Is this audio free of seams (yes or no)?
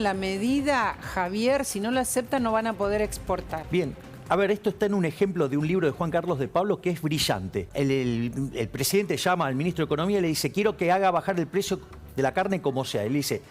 no